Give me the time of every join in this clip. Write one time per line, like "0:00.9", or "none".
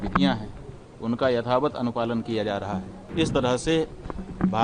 0:03.0